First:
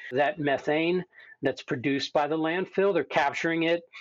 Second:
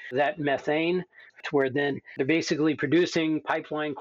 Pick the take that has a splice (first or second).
second